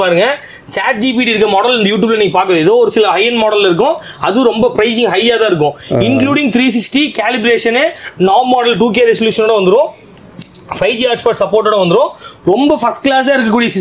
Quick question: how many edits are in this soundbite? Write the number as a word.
zero